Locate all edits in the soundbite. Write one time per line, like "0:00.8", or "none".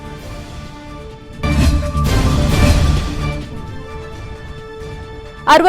0:01.0